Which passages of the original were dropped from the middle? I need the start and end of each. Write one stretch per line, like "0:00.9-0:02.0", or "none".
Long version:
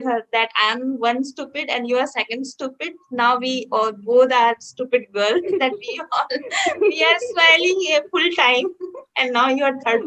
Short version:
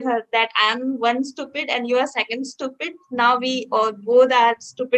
none

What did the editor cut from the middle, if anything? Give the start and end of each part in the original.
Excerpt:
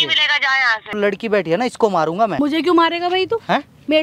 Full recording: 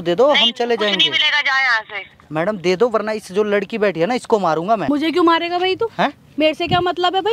0:02.0-0:03.5

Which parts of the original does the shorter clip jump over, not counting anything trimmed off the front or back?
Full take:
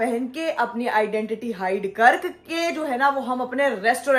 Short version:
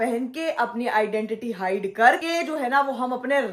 0:02.2-0:02.5

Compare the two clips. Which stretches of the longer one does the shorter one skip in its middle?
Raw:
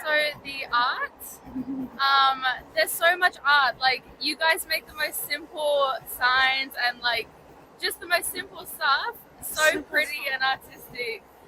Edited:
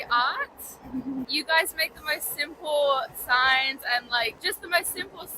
0:01.9-0:04.2
0:07.3-0:07.8

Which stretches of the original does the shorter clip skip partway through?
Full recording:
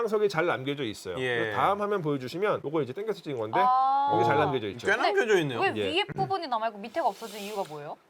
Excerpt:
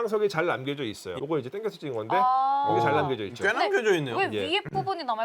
0:01.2-0:02.6

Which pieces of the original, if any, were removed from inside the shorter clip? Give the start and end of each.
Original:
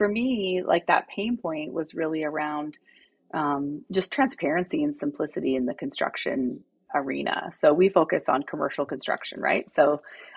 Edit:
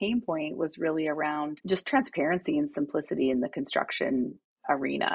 0:02.7-0:03.8

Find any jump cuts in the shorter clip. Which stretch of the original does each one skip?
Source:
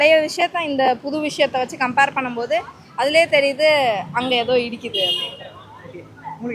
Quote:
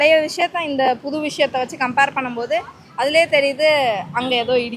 none

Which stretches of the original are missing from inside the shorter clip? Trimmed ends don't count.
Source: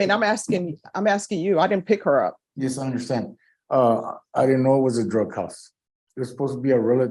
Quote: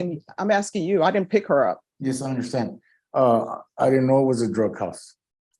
none

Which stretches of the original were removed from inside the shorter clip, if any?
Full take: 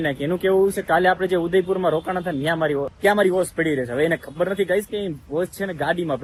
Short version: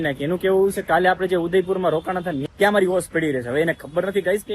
0:02.5-0:02.9

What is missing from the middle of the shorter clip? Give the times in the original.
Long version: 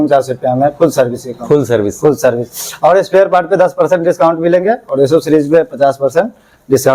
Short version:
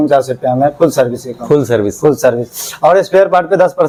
none

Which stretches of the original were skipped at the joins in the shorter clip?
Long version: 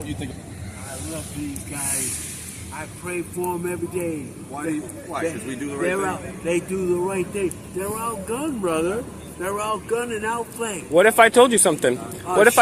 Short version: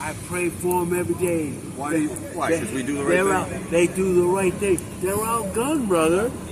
none

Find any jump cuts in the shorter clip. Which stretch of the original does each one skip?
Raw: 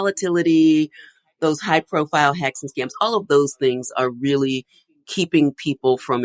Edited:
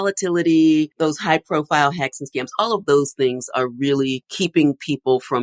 0:00.9-0:01.3
0:04.7-0:05.0

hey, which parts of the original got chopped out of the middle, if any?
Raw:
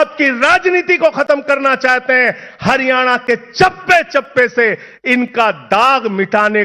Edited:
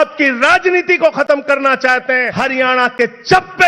0:02.3-0:02.6

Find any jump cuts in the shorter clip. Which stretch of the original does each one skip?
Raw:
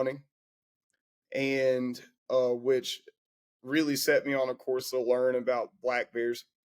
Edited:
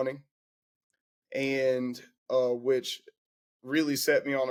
none

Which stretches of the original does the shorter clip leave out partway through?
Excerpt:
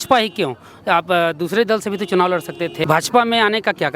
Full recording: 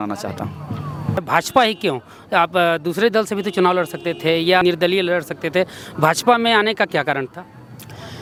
0:04.2-0:05.9

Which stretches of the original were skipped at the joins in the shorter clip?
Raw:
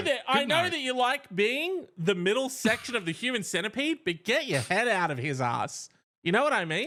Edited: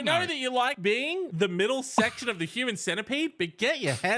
0:01.3-0:01.6

